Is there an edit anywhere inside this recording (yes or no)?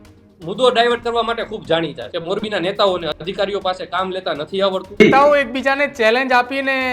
yes